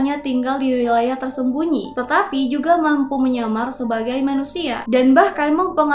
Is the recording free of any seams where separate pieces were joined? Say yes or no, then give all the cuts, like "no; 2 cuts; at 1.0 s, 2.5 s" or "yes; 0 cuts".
yes; 0 cuts